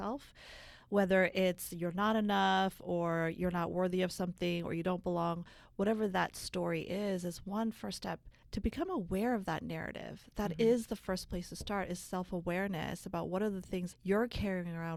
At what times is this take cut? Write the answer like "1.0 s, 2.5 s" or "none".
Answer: 8.3 s